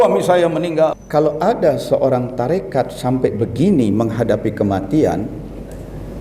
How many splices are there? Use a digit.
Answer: 1